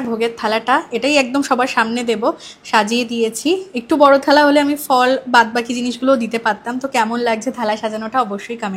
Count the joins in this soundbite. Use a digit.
0